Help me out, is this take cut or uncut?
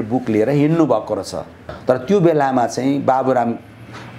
cut